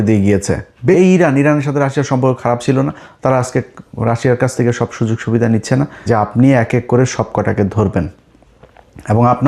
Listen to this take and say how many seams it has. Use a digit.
2